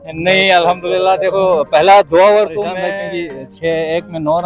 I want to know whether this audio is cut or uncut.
cut